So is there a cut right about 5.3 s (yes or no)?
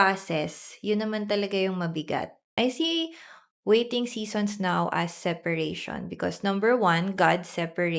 no